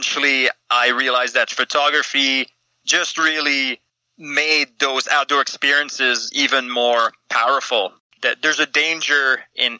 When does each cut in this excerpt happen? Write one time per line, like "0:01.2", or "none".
0:08.0